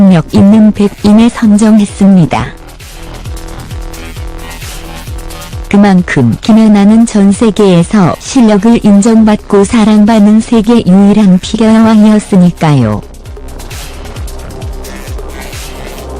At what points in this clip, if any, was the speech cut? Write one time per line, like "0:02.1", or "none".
0:04.5